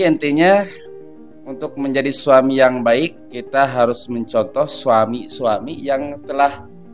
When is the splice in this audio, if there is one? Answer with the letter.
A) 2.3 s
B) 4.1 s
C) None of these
C